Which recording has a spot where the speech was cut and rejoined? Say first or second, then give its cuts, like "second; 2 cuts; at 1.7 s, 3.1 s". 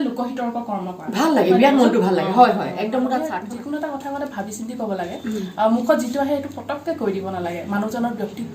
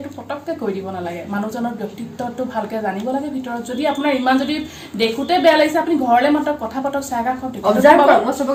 first; 1 cut; at 3.3 s